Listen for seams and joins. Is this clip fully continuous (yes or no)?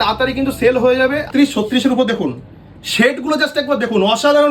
no